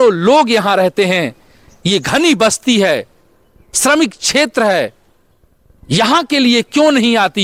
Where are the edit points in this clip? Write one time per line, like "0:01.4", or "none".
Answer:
none